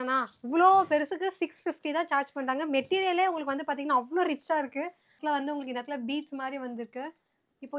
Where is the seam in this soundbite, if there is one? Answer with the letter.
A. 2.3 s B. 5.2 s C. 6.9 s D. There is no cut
B